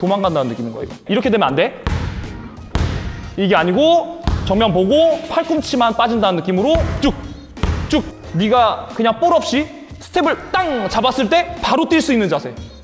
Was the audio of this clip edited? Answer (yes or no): yes